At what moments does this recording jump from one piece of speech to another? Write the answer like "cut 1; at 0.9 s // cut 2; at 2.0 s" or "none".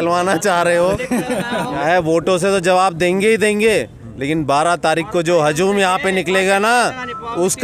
cut 1; at 1.7 s